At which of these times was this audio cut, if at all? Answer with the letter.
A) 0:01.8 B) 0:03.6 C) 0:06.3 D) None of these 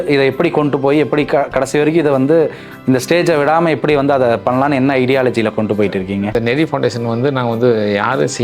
C